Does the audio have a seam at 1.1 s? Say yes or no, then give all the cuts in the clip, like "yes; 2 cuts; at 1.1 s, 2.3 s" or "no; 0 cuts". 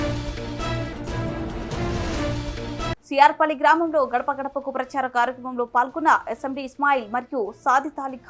no; 1 cut; at 2.5 s